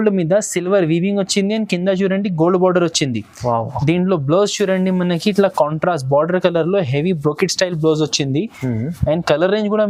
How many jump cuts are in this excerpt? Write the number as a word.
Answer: zero